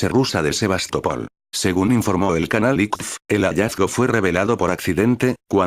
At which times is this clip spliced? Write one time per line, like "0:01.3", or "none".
0:03.9